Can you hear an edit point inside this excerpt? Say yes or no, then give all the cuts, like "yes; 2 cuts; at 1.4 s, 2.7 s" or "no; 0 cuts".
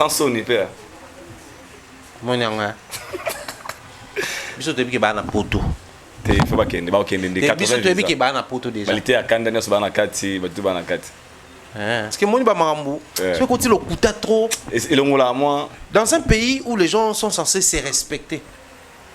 yes; 1 cut; at 12.1 s